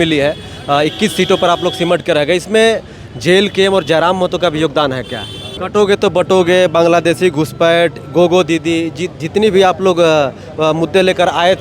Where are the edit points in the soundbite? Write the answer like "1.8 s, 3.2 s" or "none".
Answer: 5.6 s